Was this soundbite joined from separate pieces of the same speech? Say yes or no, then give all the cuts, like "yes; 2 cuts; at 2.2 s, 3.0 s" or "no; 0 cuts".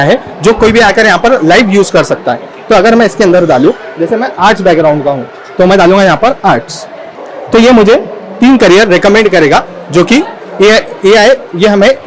no; 0 cuts